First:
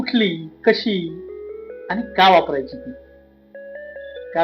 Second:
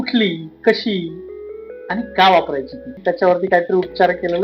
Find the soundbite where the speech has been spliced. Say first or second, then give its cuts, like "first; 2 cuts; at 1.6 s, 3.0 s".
second; 1 cut; at 3.0 s